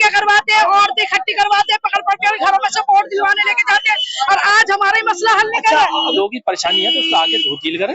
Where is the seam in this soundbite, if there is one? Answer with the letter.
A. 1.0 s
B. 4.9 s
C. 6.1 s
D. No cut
C